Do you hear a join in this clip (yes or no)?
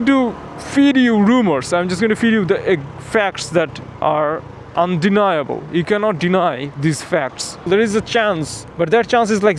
yes